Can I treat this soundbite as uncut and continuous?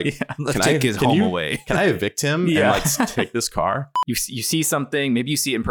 no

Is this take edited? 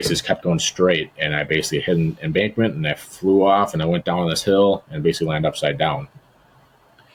no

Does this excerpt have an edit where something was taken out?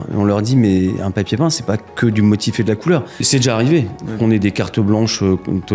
yes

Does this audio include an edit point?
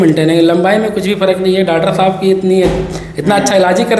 no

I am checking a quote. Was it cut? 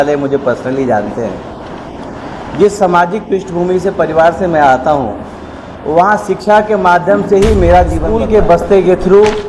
yes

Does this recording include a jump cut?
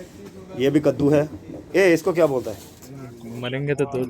yes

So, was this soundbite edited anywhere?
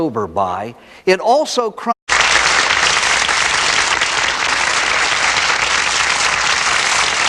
no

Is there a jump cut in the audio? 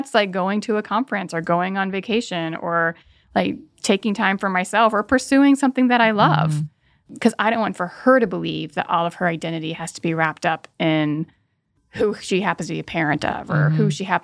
no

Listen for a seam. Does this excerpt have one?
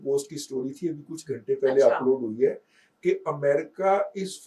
no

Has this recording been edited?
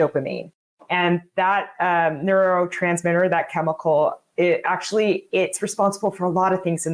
no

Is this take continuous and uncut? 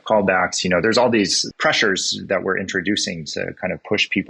no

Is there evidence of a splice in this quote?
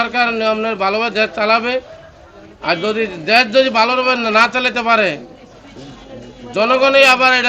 no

